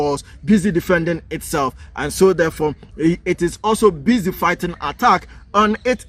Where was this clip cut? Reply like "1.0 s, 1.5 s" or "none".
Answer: none